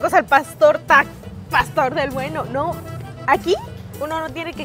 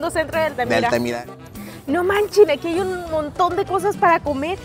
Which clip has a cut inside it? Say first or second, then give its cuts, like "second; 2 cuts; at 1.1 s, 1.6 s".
second; 1 cut; at 1.1 s